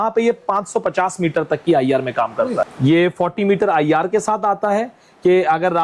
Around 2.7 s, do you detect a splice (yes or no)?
yes